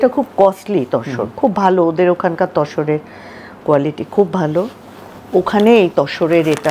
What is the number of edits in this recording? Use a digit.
0